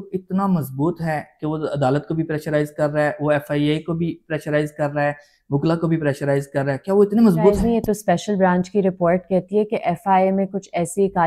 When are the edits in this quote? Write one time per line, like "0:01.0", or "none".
0:07.6

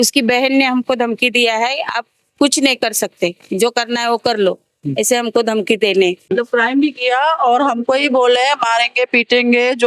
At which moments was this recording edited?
0:06.3

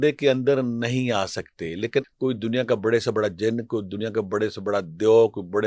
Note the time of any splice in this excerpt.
0:02.1

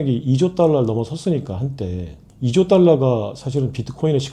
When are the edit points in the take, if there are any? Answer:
0:02.2

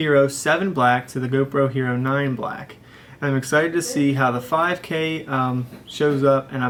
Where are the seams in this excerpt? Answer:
none

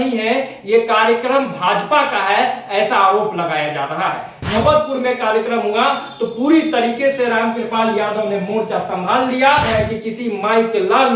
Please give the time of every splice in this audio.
0:04.6
0:09.7

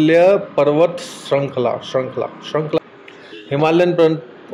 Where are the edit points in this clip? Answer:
0:02.8

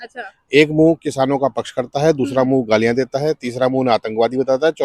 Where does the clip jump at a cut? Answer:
none

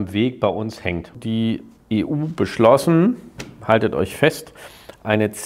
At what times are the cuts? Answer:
0:01.1

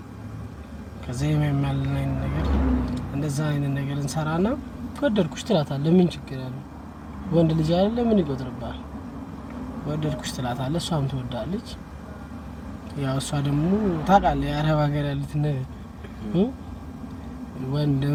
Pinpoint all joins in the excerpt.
none

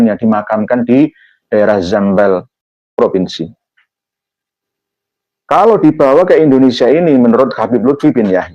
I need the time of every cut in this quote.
0:02.6

